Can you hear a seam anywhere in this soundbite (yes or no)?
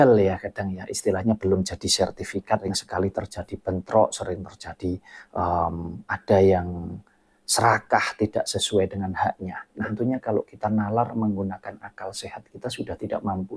yes